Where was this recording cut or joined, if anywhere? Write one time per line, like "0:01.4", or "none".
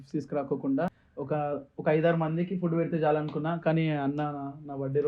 0:01.1